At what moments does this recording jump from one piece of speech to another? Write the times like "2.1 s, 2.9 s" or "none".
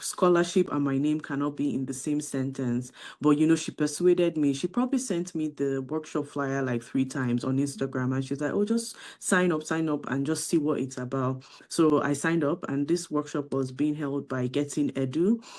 none